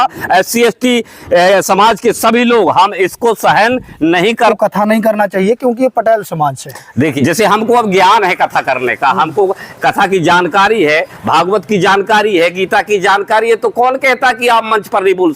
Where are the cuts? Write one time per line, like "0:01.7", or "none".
0:04.5
0:07.1